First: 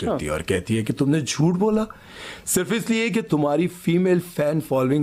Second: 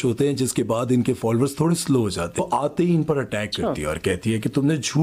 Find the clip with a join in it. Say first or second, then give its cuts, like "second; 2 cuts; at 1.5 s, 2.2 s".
second; 1 cut; at 2.4 s